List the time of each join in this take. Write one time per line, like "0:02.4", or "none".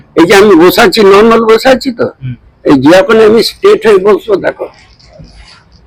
none